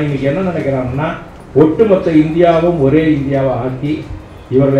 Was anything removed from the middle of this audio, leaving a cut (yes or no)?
no